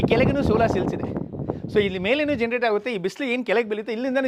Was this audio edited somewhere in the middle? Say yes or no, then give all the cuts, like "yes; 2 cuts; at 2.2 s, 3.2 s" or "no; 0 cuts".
no; 0 cuts